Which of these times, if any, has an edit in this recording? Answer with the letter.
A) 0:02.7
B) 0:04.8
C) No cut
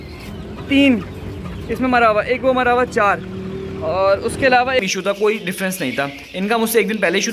B